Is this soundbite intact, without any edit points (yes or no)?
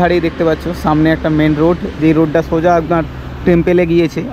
yes